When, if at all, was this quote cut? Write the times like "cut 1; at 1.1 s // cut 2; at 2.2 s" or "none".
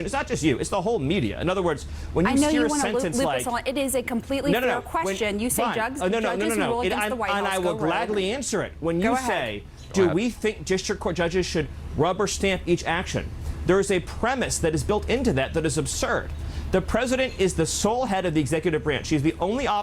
none